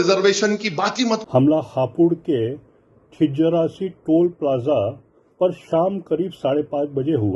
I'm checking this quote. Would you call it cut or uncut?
cut